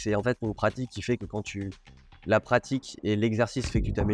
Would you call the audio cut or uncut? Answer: uncut